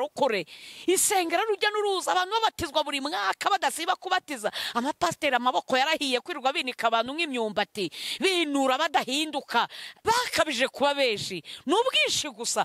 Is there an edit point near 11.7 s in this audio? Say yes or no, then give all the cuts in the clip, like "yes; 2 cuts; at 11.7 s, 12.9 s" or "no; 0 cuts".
no; 1 cut; at 9.9 s